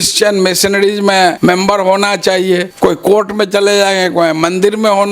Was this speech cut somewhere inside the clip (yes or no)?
yes